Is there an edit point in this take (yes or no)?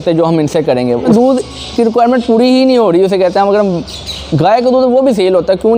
yes